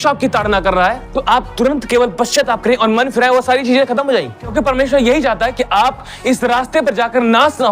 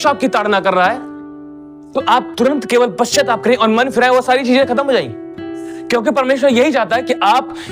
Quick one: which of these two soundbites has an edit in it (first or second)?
first